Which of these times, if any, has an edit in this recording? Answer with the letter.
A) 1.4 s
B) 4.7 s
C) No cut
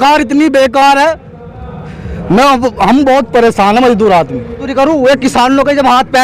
B